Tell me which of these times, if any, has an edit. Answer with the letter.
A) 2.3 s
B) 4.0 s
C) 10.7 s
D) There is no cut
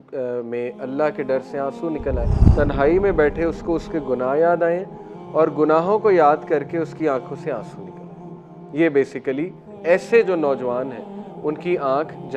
A